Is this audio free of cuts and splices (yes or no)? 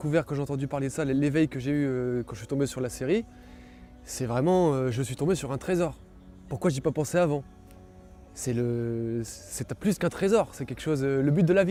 yes